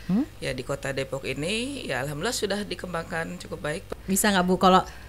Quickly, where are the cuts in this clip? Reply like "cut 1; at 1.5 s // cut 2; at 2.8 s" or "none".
cut 1; at 3.9 s